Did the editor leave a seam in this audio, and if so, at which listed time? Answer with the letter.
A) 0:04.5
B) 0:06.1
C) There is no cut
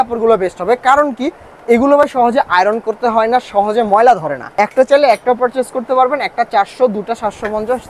A